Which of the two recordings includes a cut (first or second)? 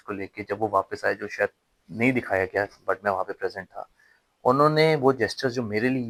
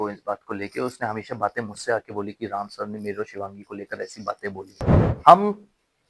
second